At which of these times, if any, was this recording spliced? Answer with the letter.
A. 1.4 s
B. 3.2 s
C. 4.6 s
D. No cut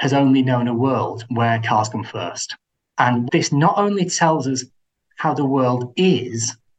B